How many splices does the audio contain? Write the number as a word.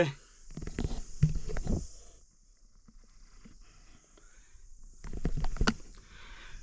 zero